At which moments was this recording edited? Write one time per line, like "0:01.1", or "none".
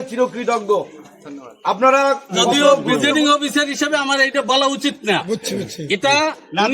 0:02.9